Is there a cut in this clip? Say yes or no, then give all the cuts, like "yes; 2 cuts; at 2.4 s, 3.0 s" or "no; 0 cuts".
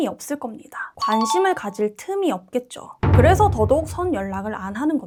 no; 0 cuts